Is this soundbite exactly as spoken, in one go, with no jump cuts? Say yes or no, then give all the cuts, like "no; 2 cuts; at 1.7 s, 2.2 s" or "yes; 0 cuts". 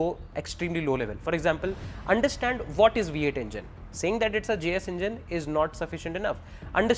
yes; 0 cuts